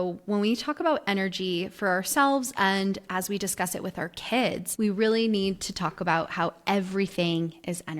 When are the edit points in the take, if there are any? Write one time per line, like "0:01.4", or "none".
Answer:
0:04.7